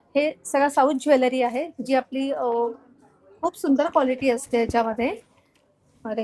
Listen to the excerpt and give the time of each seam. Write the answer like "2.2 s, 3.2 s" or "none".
none